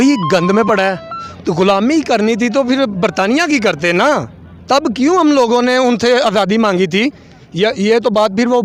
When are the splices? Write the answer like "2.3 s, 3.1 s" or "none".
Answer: 1.3 s

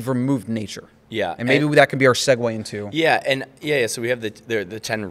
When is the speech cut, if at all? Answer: none

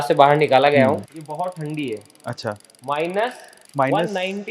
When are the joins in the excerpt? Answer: 1.1 s

